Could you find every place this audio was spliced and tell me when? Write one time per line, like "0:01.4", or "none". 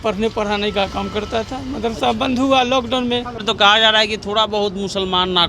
0:03.4